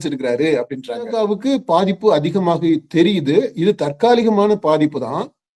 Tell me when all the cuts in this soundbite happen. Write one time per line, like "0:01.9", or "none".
0:01.1